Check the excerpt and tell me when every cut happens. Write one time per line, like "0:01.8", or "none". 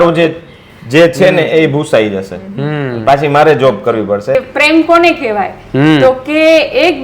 0:04.3